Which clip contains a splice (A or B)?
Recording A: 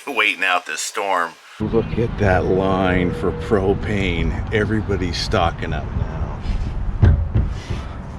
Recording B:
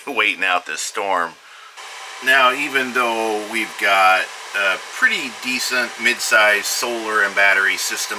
A